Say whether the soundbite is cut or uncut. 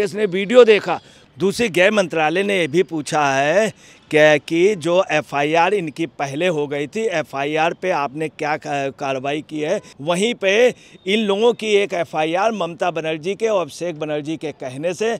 cut